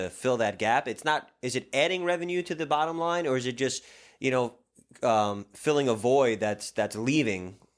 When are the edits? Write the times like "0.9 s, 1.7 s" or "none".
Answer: none